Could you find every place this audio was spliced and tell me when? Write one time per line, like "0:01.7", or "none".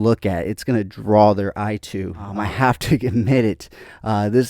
0:02.4